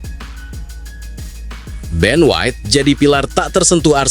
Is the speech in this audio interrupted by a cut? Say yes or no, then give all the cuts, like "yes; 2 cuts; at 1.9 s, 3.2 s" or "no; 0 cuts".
yes; 1 cut; at 1.9 s